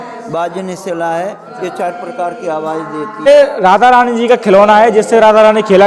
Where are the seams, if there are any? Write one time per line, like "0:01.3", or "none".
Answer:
0:03.3